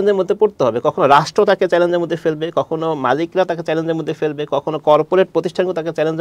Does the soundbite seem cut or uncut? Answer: uncut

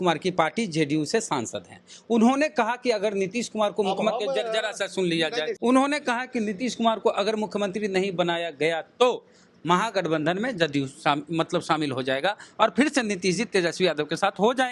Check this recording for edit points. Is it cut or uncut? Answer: cut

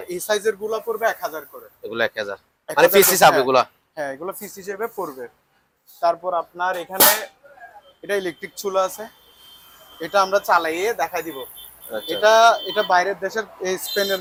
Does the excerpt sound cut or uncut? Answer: uncut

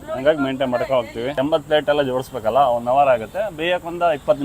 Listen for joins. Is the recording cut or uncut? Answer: cut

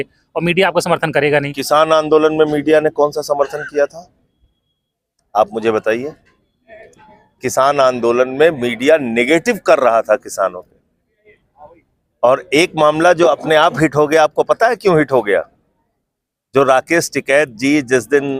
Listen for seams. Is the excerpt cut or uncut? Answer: uncut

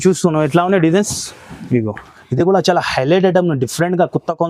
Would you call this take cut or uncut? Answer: cut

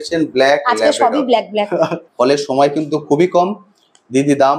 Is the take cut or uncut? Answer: cut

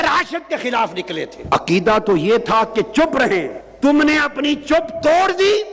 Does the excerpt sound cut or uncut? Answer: cut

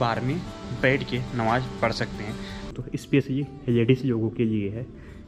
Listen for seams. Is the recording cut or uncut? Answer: cut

